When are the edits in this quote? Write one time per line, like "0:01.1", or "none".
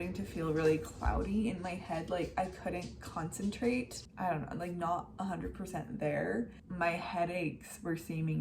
0:04.0
0:06.6